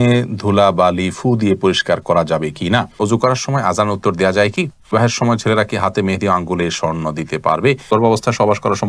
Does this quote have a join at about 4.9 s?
yes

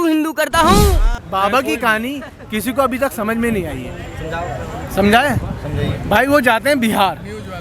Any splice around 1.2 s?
yes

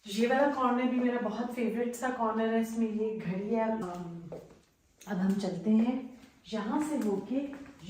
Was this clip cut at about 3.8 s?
yes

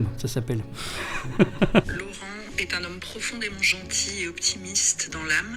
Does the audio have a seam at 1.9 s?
yes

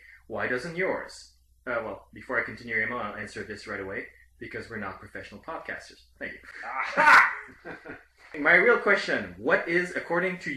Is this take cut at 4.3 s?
no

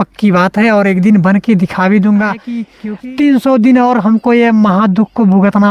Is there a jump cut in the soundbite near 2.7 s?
yes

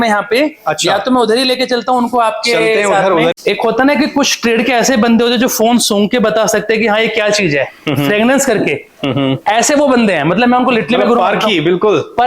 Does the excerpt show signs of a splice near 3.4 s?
yes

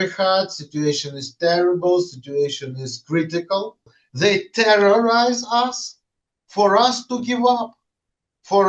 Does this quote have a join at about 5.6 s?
no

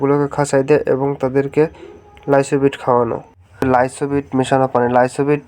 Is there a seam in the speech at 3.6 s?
yes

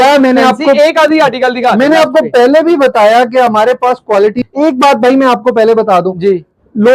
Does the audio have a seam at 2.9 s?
no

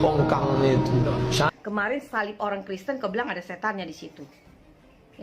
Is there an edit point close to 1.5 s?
yes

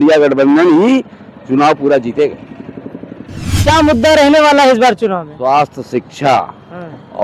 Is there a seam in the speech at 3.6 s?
yes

